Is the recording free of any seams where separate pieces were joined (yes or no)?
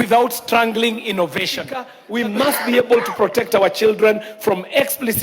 no